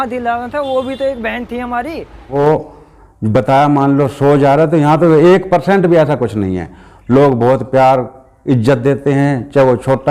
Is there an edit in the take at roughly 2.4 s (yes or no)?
yes